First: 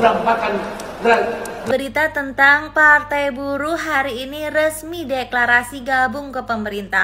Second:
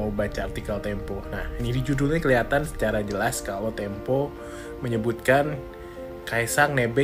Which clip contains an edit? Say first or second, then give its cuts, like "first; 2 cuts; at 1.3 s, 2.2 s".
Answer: first; 1 cut; at 1.7 s